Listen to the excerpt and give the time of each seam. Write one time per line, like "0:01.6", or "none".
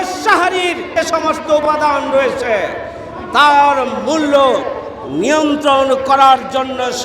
0:00.9